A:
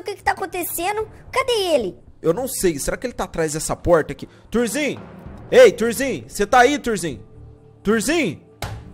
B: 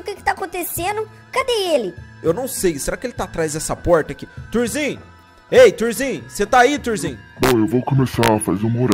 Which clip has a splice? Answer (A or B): B